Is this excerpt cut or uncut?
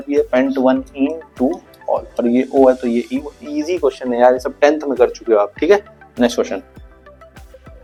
uncut